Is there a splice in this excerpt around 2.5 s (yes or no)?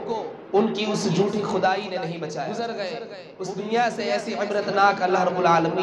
yes